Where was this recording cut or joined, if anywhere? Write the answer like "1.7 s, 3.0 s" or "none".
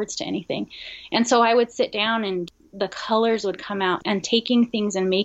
2.5 s, 4.0 s